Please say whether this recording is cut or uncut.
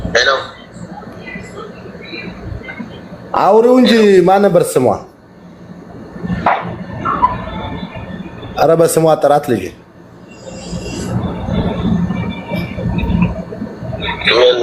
uncut